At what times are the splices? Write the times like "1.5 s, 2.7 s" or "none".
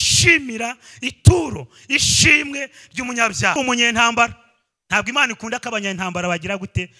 3.6 s

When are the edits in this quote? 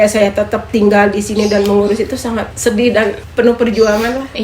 2.5 s, 3.2 s

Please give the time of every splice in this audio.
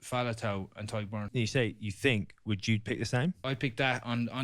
1.3 s, 3.4 s

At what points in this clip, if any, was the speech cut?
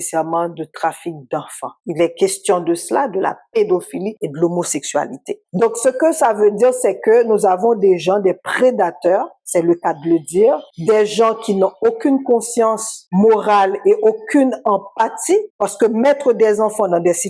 1.8 s, 5.3 s

